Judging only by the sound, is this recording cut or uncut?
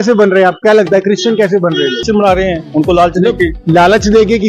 cut